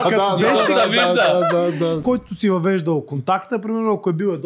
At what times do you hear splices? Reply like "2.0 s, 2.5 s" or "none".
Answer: 2.0 s